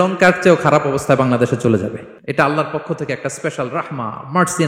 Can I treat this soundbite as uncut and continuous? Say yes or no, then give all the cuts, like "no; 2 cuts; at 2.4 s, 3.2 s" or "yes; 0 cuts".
no; 1 cut; at 2.1 s